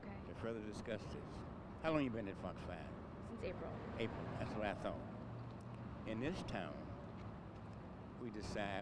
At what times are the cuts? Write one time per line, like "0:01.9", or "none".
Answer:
none